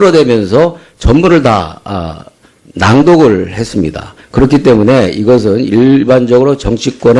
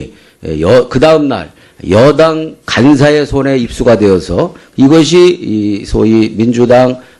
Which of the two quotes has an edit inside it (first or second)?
second